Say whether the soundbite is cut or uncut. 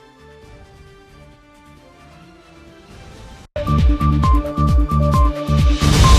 cut